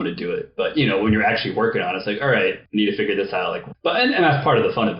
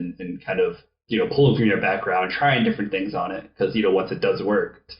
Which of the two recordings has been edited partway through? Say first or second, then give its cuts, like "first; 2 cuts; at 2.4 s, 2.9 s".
first; 2 cuts; at 2.6 s, 3.6 s